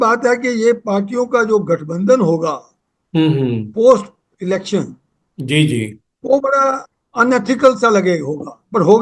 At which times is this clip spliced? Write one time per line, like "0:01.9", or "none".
none

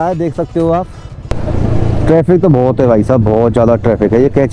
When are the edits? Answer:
0:01.3

